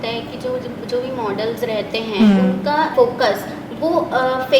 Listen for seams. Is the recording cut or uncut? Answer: cut